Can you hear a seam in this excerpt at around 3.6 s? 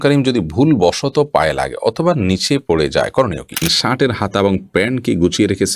yes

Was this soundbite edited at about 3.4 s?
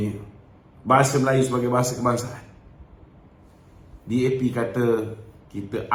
no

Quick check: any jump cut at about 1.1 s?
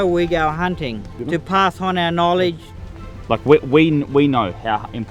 yes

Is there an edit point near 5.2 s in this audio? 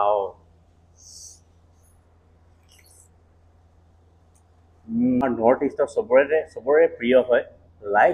yes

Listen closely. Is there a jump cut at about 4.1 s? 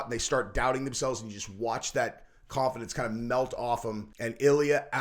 yes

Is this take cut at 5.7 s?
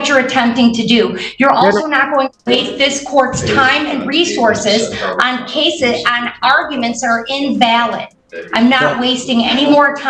no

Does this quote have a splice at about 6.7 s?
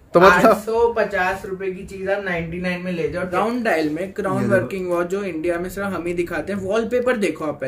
no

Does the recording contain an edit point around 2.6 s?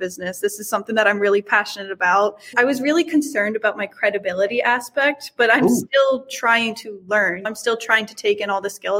yes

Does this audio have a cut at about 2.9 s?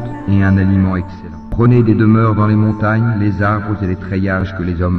no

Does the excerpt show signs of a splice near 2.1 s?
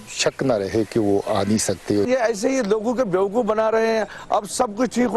yes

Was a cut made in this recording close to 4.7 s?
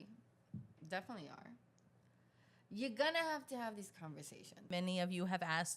yes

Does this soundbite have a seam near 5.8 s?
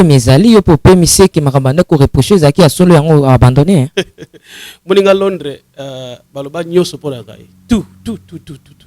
no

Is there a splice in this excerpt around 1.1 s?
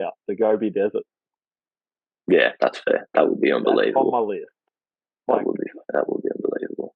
no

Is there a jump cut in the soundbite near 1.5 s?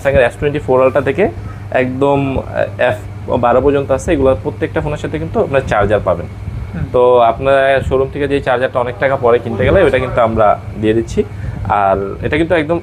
no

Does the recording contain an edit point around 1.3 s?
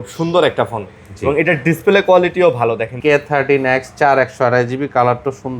no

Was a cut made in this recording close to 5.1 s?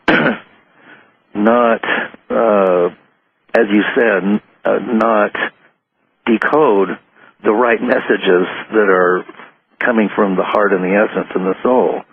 no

